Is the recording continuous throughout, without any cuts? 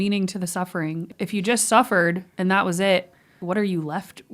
no; 2 cuts; at 1.1 s, 3.4 s

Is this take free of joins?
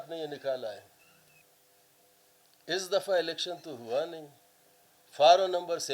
no; 1 cut; at 1.4 s

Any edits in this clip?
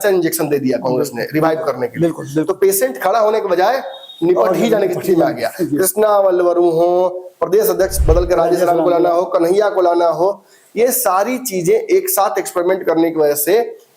no; 0 cuts

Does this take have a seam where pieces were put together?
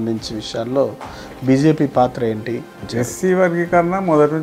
yes; 1 cut; at 2.9 s

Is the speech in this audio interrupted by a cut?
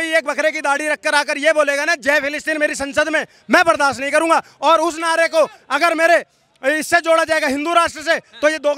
no; 0 cuts

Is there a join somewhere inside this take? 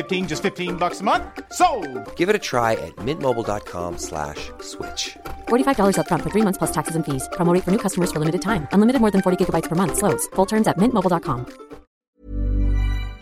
yes; 1 cut; at 12.1 s

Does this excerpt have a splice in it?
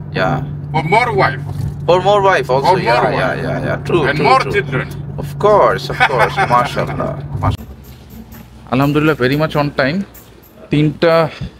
yes; 1 cut; at 7.6 s

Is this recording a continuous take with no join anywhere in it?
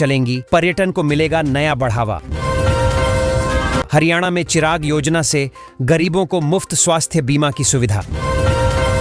yes; 0 cuts

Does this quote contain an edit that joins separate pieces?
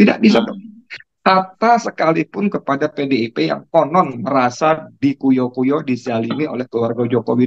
no; 0 cuts

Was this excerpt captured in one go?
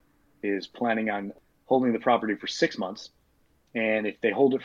no; 1 cut; at 1.3 s

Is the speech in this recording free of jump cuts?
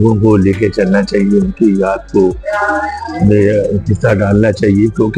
yes; 0 cuts

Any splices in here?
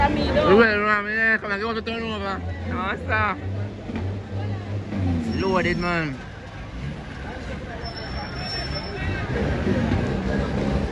no; 0 cuts

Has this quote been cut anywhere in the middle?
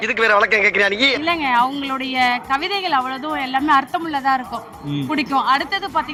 no; 0 cuts

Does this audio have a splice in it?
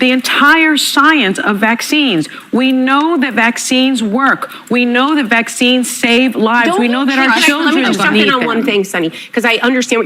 no; 0 cuts

